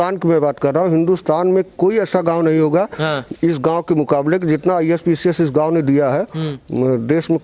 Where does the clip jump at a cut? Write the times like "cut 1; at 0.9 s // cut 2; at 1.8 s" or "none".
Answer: none